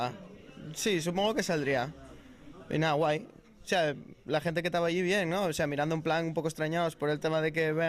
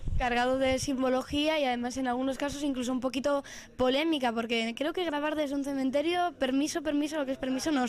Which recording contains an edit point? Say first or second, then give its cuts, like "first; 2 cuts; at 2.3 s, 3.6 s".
first; 1 cut; at 6.7 s